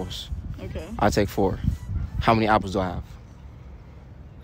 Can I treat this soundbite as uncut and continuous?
yes; 0 cuts

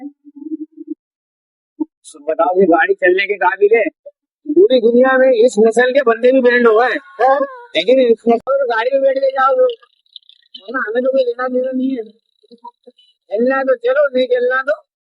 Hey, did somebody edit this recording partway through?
yes; 1 cut; at 8.4 s

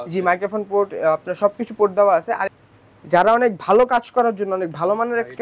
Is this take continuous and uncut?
no; 1 cut; at 2.5 s

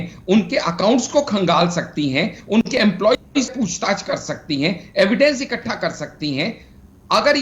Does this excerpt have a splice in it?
no; 0 cuts

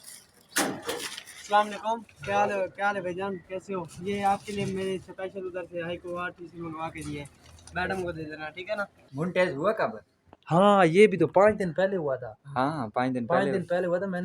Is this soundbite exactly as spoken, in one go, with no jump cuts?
no; 1 cut; at 9.1 s

